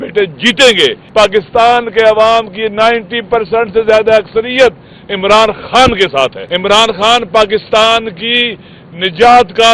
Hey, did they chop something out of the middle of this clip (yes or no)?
yes